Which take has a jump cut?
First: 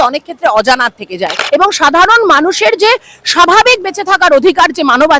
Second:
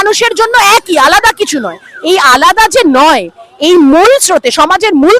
first; 1 cut; at 1.4 s

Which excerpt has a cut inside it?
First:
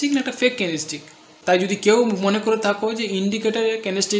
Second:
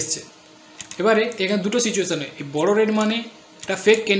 first; 1 cut; at 1.3 s

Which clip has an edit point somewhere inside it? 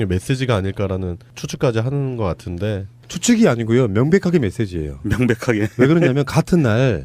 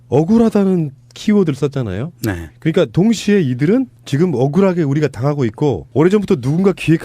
second; 1 cut; at 3.7 s

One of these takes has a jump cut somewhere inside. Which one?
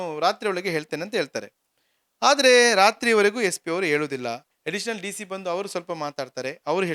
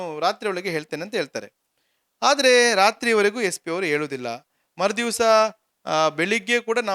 first; 1 cut; at 4.5 s

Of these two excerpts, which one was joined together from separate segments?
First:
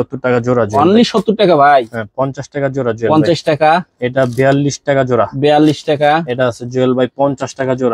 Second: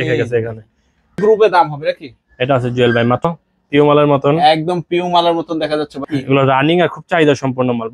second; 3 cuts; at 1.2 s, 3.3 s, 6.0 s

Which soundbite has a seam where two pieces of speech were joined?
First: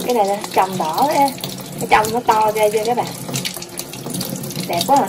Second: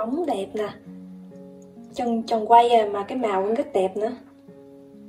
second; 1 cut; at 4.2 s

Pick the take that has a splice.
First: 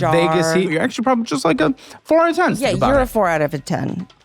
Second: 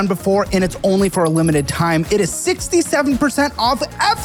first; 2 cuts; at 0.7 s, 2.6 s

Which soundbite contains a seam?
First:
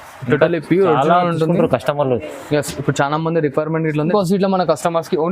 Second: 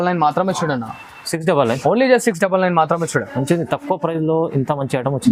first; 1 cut; at 4.1 s

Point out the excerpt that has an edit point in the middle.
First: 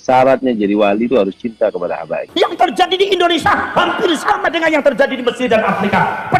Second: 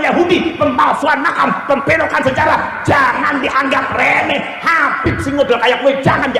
first; 1 cut; at 2.2 s

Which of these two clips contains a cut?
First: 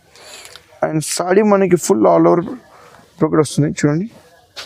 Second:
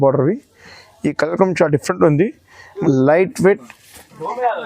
second; 1 cut; at 2.7 s

